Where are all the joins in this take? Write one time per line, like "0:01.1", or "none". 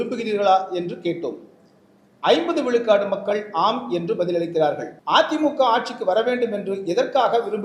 0:04.9